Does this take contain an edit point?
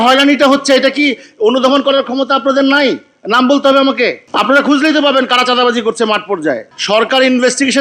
yes; 1 cut; at 6.7 s

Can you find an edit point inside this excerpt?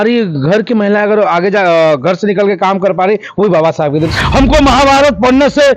yes; 1 cut; at 4.1 s

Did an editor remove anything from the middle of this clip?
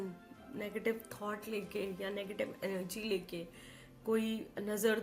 no; 0 cuts

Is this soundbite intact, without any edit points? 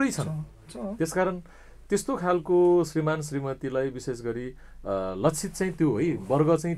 yes; 0 cuts

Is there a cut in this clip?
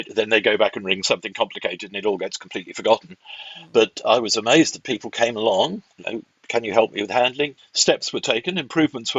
yes; 1 cut; at 7.6 s

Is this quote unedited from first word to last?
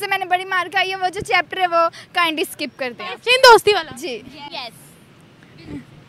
yes; 0 cuts

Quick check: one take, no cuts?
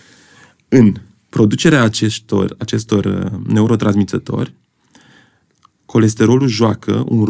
yes; 0 cuts

